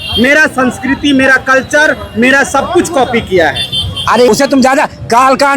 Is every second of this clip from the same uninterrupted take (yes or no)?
no